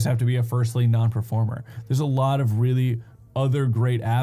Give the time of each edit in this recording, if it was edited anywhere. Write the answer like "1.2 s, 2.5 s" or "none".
none